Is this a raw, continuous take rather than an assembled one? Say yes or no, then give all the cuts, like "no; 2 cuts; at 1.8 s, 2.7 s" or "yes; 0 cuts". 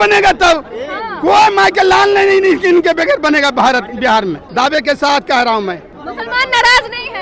no; 2 cuts; at 4.4 s, 5.9 s